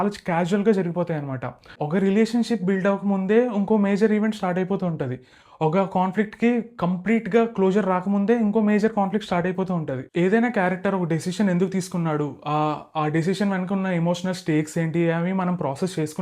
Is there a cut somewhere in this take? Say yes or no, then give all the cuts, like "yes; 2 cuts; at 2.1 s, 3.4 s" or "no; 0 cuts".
yes; 1 cut; at 1.8 s